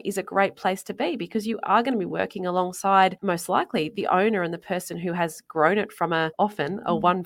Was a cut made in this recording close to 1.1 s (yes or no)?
no